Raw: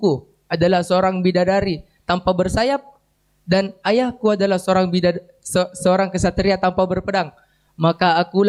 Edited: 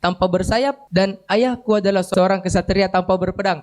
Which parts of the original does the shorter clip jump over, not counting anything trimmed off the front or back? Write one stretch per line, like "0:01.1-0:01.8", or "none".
0:02.9-0:03.4
0:04.6-0:05.8